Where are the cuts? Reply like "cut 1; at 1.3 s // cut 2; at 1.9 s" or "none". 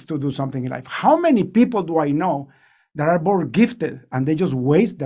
none